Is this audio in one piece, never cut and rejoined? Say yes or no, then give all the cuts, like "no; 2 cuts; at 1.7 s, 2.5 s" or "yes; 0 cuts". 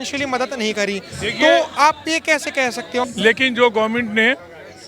no; 1 cut; at 3.1 s